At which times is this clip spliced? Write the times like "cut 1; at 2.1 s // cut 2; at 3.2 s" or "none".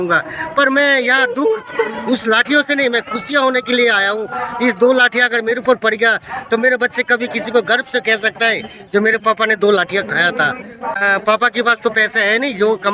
cut 1; at 11.0 s